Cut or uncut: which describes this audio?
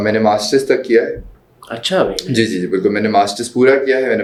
uncut